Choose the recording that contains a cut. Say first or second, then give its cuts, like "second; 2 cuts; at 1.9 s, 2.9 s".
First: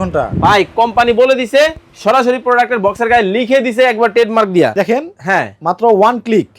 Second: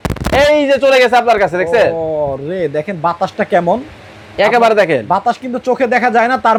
first; 1 cut; at 4.8 s